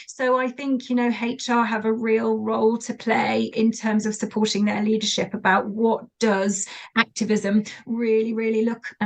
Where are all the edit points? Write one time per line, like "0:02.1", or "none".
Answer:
0:06.8